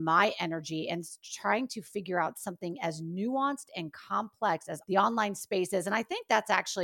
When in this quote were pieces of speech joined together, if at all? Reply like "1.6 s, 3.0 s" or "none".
4.7 s